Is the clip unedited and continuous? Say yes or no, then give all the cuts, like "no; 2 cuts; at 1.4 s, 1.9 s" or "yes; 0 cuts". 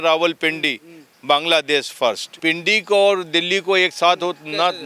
no; 1 cut; at 2.3 s